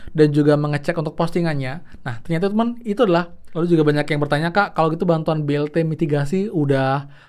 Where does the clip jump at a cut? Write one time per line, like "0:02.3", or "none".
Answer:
0:03.4